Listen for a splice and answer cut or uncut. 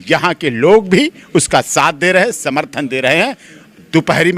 uncut